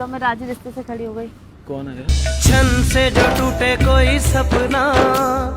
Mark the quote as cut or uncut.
uncut